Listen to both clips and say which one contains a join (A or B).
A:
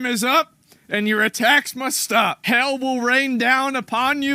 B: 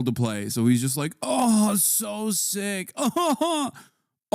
A